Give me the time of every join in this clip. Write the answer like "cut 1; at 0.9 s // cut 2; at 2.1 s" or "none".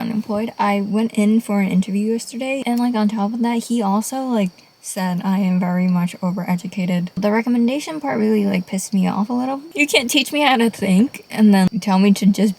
cut 1; at 2.6 s // cut 2; at 7.1 s // cut 3; at 9.6 s

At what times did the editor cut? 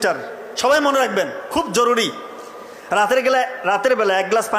none

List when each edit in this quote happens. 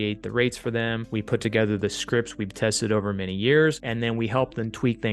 cut 1; at 1.0 s // cut 2; at 3.8 s

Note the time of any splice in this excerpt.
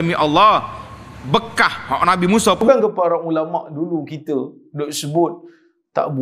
cut 1; at 2.6 s

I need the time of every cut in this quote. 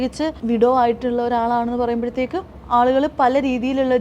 cut 1; at 2.6 s

